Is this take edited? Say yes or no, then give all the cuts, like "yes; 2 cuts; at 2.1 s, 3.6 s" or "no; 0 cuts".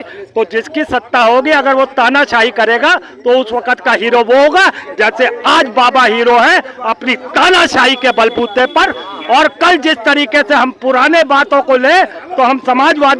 no; 0 cuts